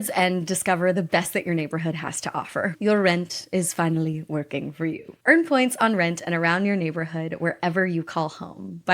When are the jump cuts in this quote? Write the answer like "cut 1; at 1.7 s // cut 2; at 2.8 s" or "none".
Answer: cut 1; at 2.7 s